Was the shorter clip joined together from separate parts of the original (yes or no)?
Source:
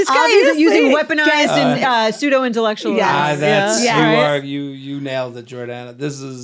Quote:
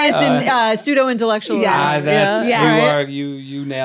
no